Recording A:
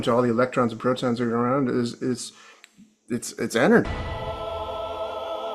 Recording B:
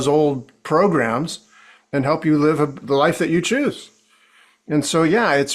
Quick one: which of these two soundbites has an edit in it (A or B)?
A